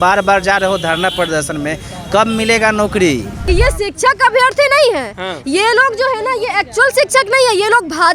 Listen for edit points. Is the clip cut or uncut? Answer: cut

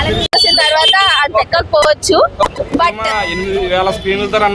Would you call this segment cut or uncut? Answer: cut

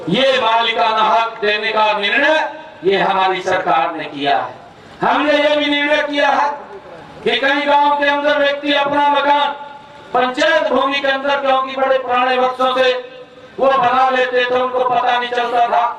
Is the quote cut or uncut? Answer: uncut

